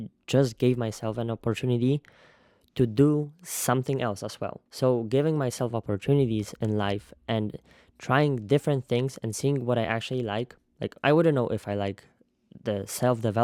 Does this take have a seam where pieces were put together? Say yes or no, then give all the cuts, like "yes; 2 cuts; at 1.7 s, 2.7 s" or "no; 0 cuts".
no; 0 cuts